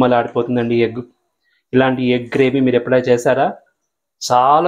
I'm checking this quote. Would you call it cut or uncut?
uncut